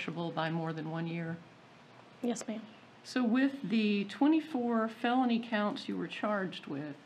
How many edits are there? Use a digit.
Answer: 1